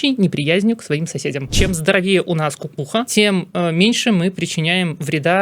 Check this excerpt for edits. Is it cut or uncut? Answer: cut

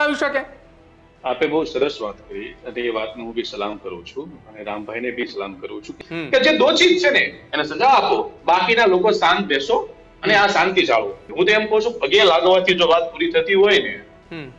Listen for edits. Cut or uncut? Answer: cut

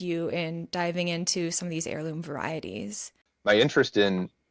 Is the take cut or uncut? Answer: cut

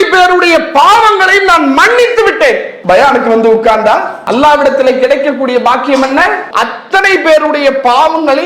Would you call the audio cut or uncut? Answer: cut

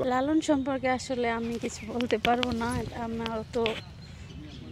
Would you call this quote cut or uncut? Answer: uncut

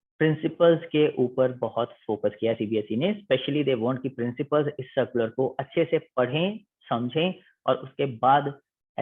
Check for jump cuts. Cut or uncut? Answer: uncut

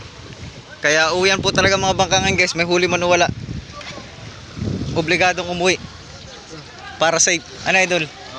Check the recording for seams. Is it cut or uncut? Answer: uncut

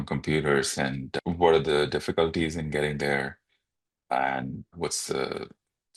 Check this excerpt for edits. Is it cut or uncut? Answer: cut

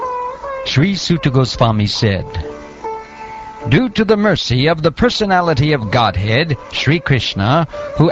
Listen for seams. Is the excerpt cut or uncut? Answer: uncut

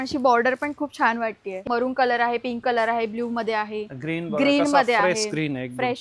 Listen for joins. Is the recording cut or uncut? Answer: cut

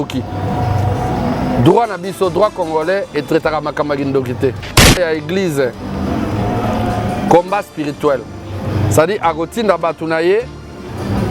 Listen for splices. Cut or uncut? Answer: cut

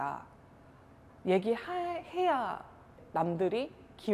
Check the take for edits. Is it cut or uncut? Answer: uncut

